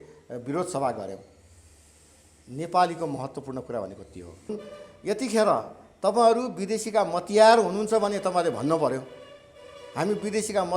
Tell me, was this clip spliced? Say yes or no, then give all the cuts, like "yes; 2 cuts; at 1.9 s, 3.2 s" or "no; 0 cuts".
yes; 1 cut; at 4.5 s